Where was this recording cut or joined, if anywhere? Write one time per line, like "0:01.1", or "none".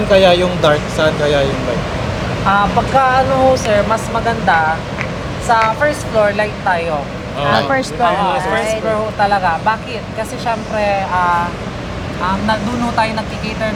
none